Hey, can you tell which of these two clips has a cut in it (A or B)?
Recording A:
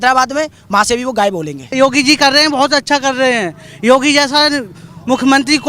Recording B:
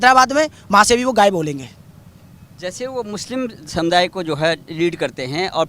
A